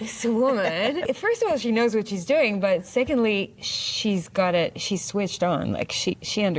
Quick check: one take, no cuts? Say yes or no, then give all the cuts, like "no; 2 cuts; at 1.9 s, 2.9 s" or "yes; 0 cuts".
yes; 0 cuts